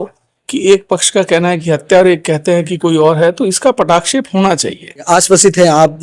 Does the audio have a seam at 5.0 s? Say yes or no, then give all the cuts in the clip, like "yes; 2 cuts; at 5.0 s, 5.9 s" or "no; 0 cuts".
yes; 1 cut; at 5.0 s